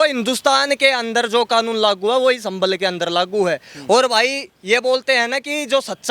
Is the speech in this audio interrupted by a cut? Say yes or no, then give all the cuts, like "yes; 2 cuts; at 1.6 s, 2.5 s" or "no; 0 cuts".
no; 0 cuts